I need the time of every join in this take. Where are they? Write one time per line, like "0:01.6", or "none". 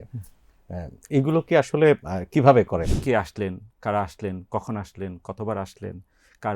0:02.9